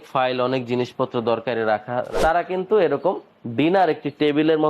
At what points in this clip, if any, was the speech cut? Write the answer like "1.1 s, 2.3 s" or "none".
2.1 s